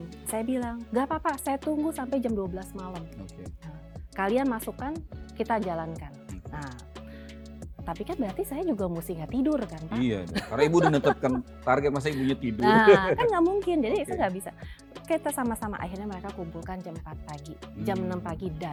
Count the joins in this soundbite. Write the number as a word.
zero